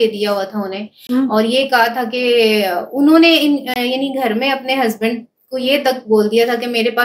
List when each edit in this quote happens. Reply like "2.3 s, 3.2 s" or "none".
none